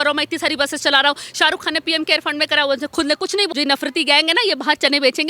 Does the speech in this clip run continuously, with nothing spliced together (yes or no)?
no